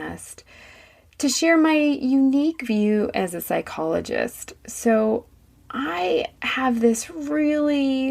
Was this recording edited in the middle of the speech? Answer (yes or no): no